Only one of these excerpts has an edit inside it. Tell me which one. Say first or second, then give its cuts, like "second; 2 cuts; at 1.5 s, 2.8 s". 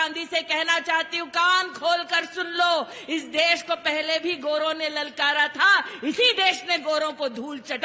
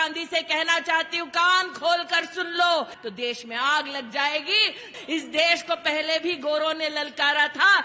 second; 2 cuts; at 3.0 s, 4.9 s